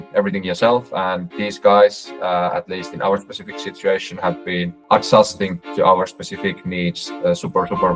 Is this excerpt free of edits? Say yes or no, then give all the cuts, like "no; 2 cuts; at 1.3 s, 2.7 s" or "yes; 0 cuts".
yes; 0 cuts